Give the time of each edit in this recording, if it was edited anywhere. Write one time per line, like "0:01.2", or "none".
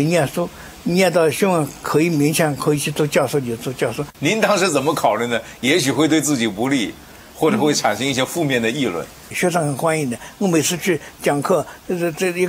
0:04.1
0:09.3